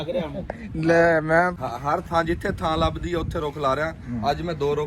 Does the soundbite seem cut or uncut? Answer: cut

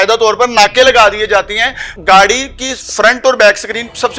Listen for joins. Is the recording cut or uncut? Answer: cut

